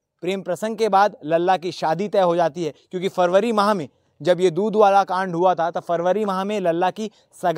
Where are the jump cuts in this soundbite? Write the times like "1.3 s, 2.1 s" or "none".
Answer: none